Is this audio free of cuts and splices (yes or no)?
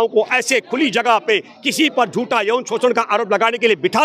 yes